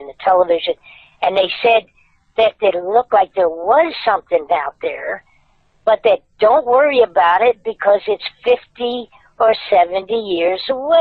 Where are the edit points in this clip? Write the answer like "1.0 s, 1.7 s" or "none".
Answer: none